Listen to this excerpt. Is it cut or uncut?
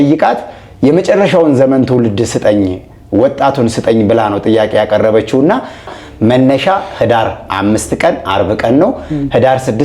cut